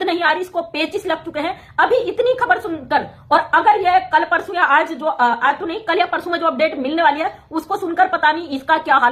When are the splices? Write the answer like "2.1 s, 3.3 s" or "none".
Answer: none